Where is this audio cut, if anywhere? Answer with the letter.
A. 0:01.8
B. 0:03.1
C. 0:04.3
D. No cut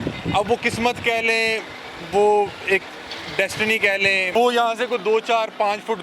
C